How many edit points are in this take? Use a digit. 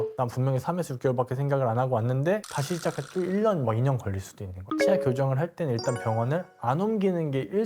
1